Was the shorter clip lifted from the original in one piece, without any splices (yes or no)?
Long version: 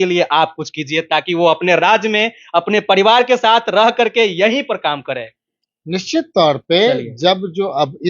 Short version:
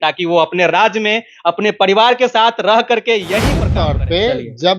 no